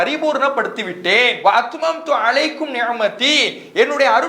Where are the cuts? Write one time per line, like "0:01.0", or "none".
0:01.4